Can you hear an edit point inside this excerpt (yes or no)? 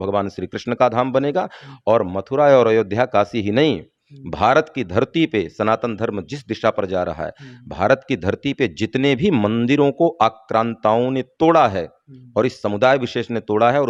no